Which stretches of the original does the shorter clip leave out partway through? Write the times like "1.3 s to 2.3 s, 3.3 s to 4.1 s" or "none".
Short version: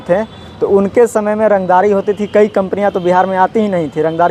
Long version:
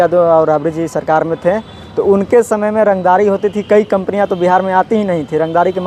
none